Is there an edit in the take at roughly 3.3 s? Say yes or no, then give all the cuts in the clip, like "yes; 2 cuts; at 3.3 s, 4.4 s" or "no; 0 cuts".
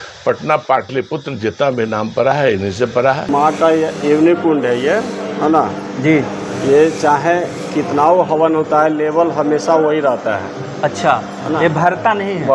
yes; 1 cut; at 3.3 s